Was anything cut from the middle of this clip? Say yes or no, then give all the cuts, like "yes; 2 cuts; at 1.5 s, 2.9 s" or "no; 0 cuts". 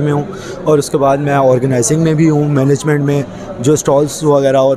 no; 0 cuts